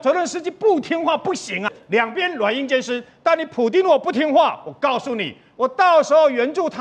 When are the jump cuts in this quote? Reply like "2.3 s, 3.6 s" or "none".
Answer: 1.8 s